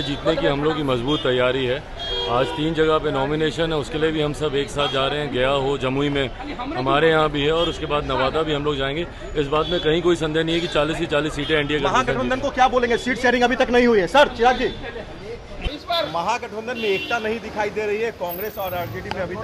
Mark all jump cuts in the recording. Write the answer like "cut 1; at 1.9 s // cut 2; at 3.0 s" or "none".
none